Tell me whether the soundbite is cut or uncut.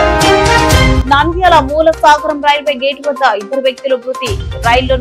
uncut